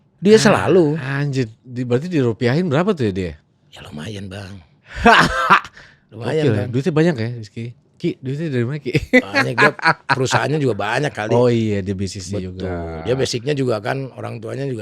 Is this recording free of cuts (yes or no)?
yes